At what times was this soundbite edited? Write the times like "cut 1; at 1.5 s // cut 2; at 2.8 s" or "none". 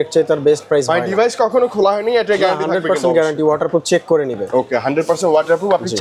none